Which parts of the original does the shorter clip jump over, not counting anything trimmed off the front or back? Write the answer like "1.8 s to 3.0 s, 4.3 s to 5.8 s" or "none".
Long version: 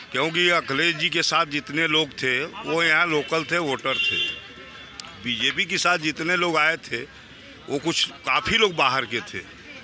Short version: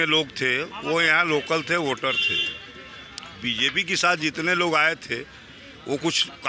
none